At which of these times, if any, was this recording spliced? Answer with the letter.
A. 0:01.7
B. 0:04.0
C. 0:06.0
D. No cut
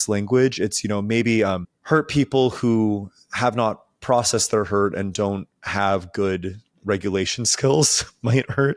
A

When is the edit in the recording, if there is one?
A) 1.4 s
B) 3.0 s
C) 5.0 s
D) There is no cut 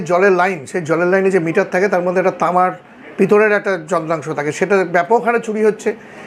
D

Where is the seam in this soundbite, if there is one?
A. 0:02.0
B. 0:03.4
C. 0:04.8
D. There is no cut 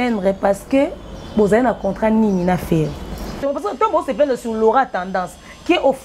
B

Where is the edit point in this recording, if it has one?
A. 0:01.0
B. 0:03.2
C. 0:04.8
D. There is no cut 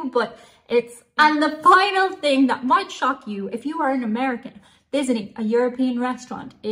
A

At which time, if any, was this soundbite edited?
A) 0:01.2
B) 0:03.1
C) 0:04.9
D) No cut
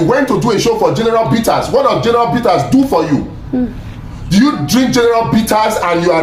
D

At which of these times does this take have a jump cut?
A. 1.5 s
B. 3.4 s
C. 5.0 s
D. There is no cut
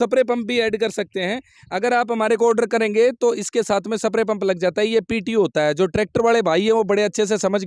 D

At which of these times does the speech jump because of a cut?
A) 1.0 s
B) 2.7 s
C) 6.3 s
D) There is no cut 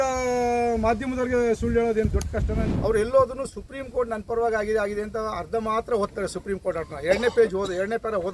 B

